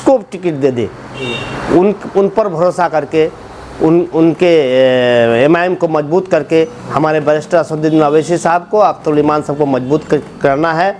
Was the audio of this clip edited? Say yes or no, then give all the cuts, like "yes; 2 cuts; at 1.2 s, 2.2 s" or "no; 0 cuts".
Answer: no; 0 cuts